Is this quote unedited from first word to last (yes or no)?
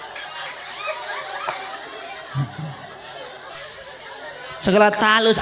no